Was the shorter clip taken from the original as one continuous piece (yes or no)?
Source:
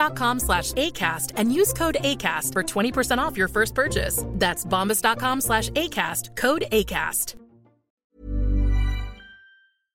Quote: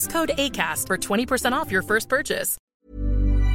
no